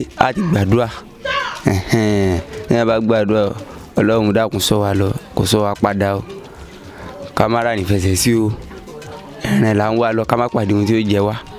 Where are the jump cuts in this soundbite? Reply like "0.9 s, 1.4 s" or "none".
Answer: none

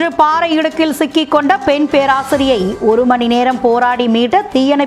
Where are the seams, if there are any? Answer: none

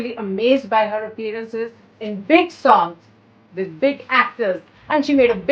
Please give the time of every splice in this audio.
none

